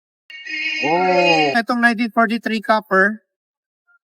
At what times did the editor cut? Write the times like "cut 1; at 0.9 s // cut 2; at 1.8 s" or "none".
cut 1; at 1.5 s